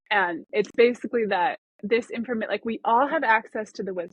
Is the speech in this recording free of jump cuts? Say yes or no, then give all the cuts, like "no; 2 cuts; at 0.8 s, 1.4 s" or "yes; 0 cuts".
no; 1 cut; at 1.7 s